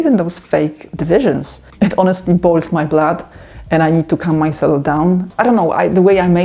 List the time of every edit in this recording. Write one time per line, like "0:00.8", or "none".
0:01.6
0:05.2

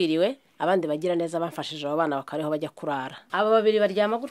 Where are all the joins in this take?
0:03.2

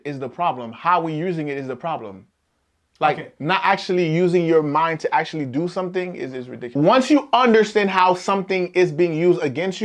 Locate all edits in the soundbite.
0:06.7

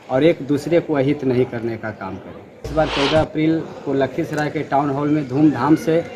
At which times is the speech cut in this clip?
0:02.7

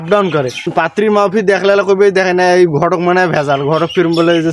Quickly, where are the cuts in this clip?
none

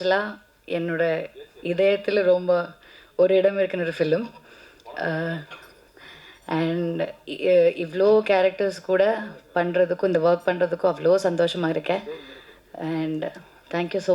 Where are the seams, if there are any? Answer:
none

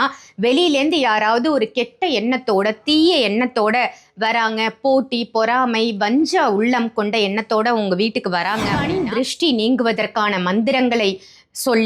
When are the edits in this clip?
0:08.8

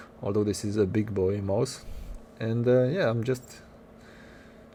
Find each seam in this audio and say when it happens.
none

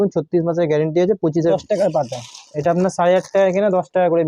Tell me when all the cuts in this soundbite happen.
0:01.5

